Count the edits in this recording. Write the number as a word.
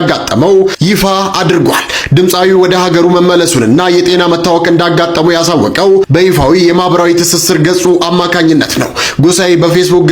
zero